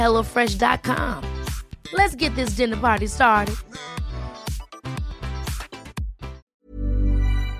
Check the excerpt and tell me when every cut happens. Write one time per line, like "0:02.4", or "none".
0:06.4

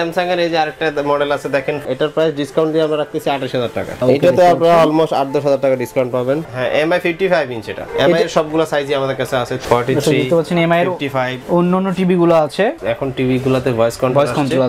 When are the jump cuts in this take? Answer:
0:01.9
0:04.0
0:06.5
0:09.6
0:12.8

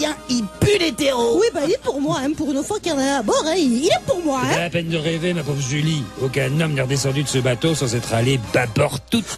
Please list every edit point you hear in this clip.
0:05.7

